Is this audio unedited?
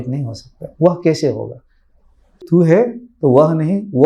no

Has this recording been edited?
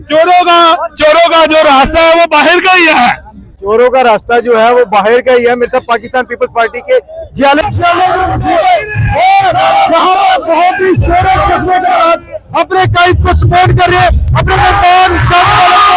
no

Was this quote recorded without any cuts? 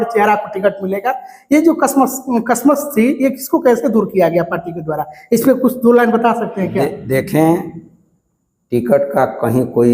yes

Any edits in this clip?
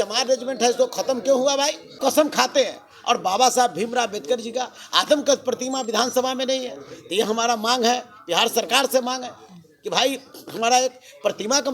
yes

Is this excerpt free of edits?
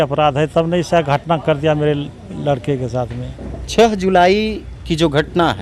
yes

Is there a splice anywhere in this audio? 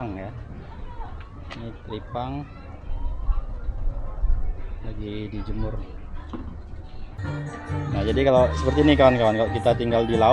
yes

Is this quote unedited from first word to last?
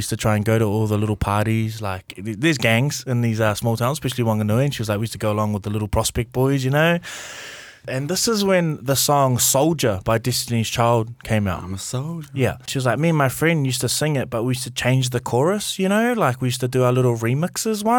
no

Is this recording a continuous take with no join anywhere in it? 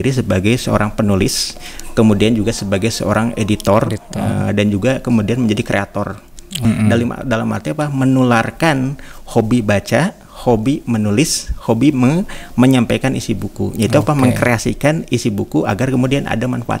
no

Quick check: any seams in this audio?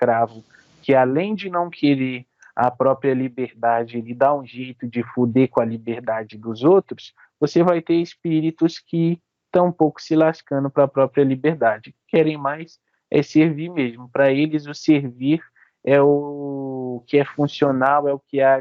no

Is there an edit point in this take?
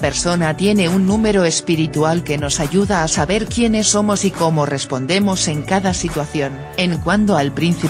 yes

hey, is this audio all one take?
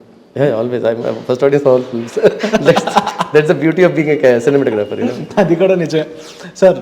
yes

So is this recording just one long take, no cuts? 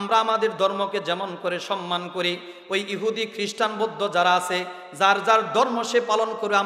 yes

